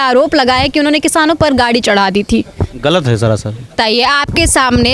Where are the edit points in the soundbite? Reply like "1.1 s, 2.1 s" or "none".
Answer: 3.7 s